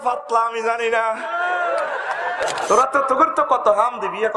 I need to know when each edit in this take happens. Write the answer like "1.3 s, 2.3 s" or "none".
2.4 s